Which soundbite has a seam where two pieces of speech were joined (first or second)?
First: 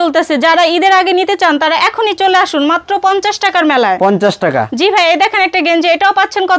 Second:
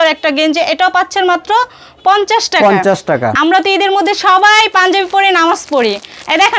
second